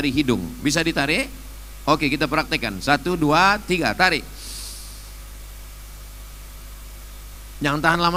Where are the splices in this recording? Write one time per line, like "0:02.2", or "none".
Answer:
none